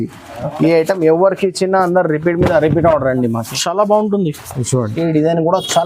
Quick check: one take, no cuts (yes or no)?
no